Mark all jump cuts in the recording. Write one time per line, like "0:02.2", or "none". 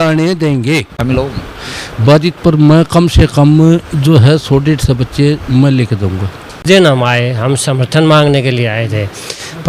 0:01.0
0:06.6